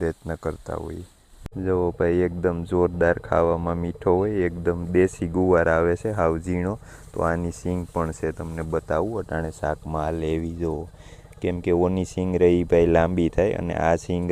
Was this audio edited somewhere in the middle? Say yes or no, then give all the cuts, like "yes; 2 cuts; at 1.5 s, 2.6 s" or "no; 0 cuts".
yes; 1 cut; at 1.4 s